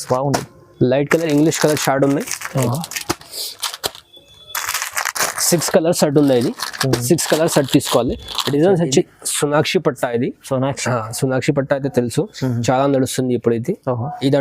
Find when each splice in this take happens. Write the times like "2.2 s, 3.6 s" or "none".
9.1 s